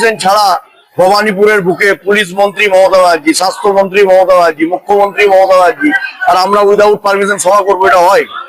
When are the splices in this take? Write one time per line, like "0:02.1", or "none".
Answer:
none